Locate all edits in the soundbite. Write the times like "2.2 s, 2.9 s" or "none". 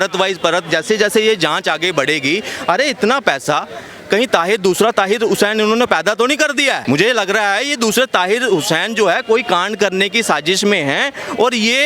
none